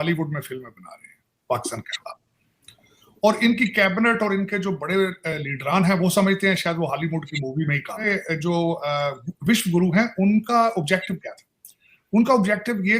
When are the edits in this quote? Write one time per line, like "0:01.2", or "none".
0:08.0